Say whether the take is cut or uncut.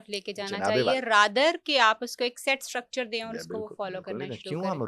uncut